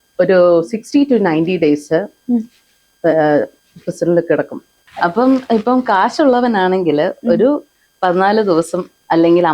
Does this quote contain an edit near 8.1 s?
no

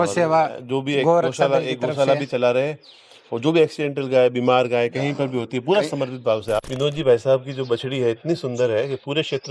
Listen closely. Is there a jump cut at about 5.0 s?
no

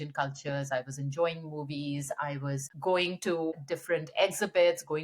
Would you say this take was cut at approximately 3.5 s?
yes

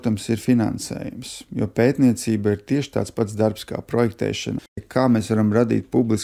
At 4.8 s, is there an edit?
yes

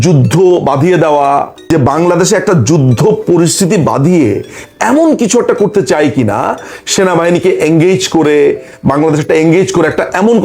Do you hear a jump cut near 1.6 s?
yes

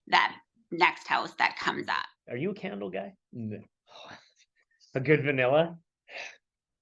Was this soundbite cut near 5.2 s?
no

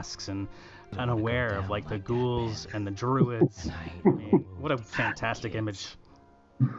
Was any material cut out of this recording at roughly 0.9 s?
yes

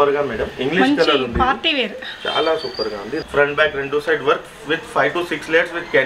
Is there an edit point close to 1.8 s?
no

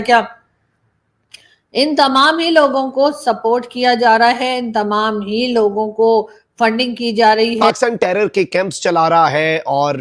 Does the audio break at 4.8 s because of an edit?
no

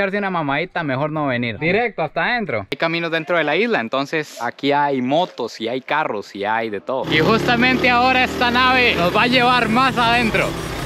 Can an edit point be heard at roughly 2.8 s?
yes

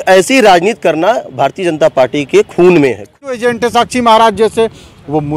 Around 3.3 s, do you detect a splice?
yes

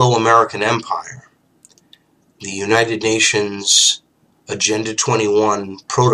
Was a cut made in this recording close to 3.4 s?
yes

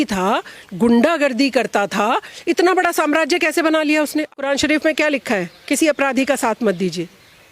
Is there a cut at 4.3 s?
yes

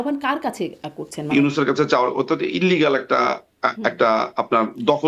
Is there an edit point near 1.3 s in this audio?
yes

